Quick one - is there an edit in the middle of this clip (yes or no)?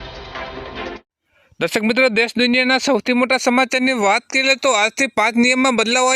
yes